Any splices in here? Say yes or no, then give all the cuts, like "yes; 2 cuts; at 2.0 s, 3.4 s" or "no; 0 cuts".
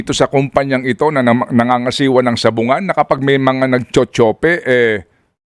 no; 0 cuts